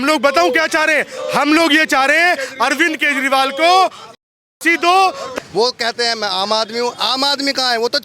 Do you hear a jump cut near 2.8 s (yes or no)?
no